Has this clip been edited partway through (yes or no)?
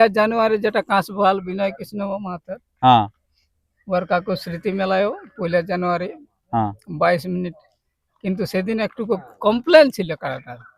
no